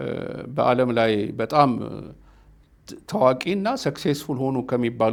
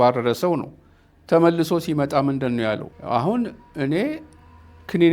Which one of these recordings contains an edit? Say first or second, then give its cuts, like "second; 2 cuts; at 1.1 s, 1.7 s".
second; 1 cut; at 2.9 s